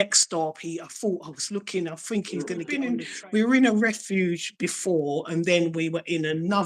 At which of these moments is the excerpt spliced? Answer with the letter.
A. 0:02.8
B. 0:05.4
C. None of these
A